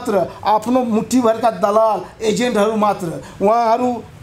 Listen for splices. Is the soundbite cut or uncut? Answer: uncut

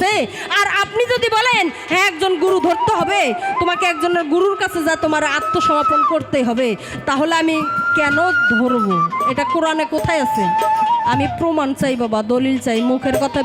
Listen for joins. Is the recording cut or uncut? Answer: uncut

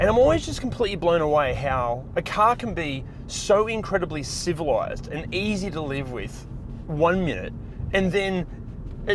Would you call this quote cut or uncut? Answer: uncut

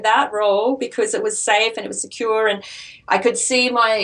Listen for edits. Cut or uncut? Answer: uncut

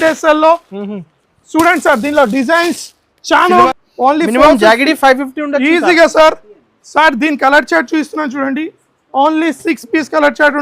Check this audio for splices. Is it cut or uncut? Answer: cut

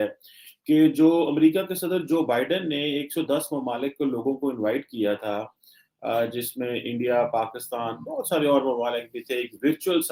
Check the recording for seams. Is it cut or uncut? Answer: uncut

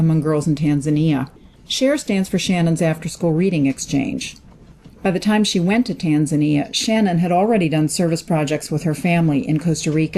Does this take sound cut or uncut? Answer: cut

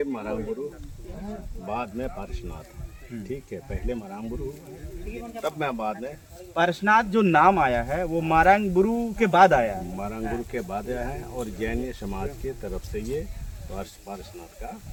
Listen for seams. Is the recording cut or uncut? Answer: uncut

